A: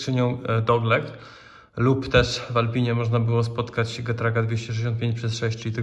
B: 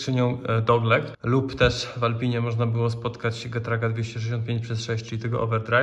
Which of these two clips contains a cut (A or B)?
B